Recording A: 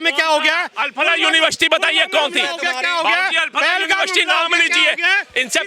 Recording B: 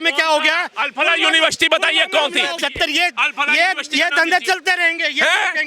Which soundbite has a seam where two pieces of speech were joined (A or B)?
B